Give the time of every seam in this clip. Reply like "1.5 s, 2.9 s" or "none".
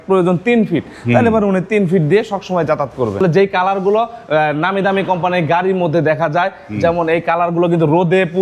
3.2 s